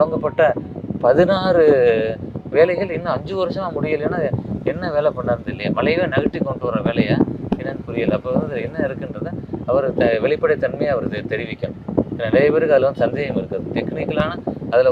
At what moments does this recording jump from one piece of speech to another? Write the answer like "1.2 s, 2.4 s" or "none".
none